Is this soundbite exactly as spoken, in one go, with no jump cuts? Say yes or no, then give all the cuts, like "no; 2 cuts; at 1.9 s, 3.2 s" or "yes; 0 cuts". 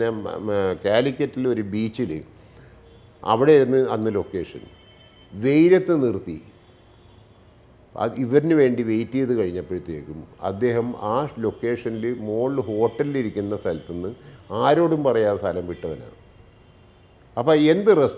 yes; 0 cuts